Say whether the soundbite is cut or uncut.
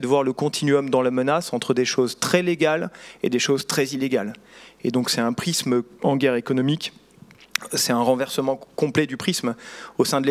uncut